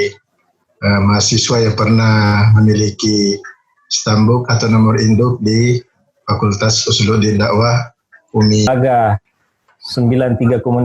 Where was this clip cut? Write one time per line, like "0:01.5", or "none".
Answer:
0:08.7

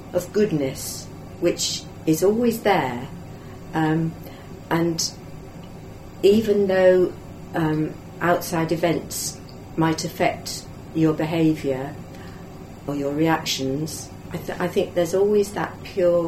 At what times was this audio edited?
none

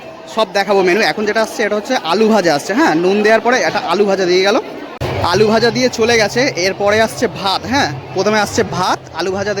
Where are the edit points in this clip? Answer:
0:05.1

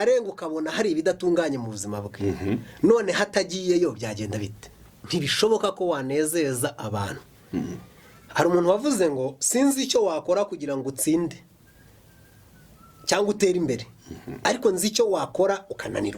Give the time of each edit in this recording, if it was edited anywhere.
0:05.0

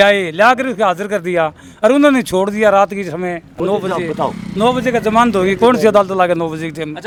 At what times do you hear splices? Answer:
none

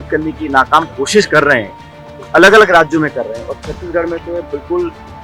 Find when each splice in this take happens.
none

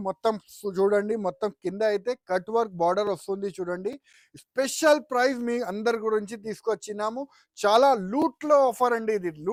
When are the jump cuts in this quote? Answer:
none

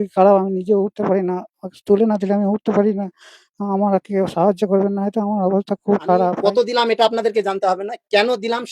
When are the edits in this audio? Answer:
0:06.4

